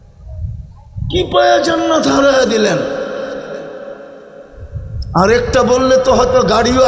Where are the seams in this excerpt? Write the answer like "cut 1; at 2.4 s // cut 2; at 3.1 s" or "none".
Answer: cut 1; at 5.0 s

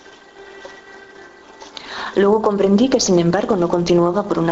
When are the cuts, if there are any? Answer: none

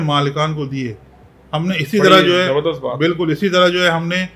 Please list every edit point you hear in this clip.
none

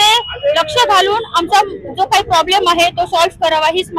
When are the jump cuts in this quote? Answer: none

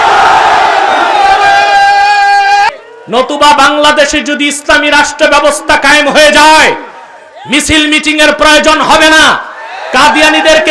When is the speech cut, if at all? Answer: cut 1; at 2.7 s

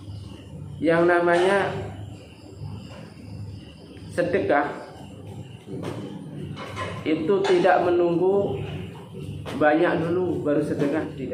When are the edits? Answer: none

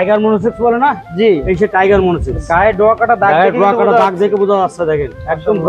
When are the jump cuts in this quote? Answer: none

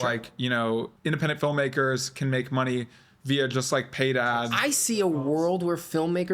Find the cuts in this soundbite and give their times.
cut 1; at 0.9 s // cut 2; at 4.5 s

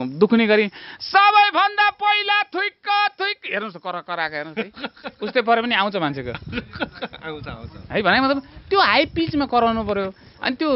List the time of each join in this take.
none

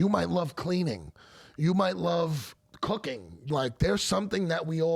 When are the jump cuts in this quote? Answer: cut 1; at 3.5 s

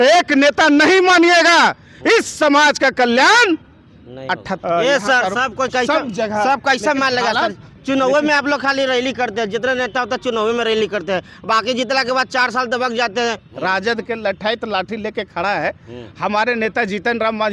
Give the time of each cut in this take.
cut 1; at 4.5 s // cut 2; at 13.5 s

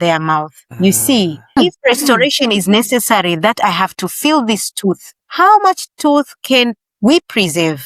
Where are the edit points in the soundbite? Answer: cut 1; at 1.5 s

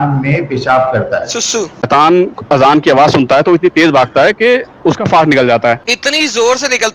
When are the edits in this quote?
cut 1; at 1.9 s // cut 2; at 5.9 s

